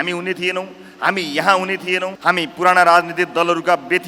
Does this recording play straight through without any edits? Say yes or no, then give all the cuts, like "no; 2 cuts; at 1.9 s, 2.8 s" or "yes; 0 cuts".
no; 1 cut; at 2.1 s